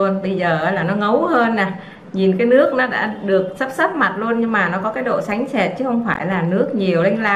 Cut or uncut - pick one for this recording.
uncut